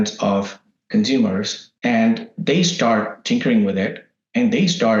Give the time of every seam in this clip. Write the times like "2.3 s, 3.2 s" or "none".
none